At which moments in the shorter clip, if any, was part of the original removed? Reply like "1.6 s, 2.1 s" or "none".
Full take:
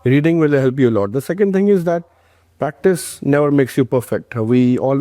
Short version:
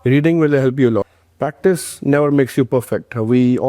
1.1 s